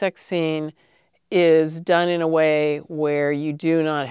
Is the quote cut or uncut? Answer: uncut